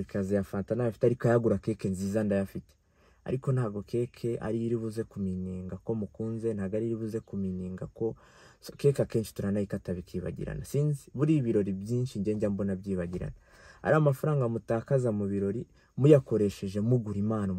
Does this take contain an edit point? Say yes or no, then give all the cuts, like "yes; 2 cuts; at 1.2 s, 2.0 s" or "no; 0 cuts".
no; 0 cuts